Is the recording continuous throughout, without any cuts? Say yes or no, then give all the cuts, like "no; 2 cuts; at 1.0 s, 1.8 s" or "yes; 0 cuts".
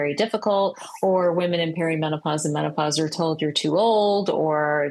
yes; 0 cuts